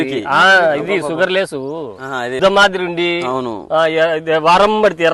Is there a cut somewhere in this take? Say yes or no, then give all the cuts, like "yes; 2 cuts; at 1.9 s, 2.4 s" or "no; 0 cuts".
yes; 1 cut; at 2.4 s